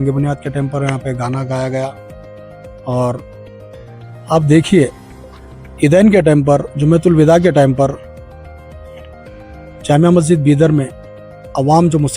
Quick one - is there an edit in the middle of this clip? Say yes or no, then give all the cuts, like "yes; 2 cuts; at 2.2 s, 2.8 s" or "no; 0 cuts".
yes; 2 cuts; at 8.0 s, 9.4 s